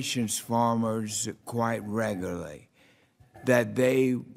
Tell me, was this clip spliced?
yes; 1 cut; at 2.3 s

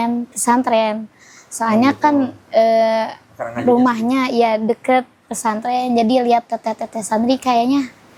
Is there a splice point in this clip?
no; 0 cuts

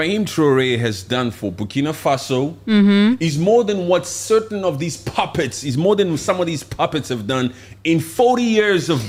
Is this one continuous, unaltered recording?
yes; 0 cuts

